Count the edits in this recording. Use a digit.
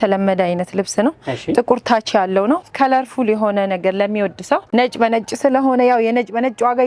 1